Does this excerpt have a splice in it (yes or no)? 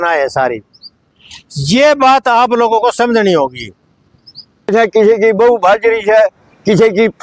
yes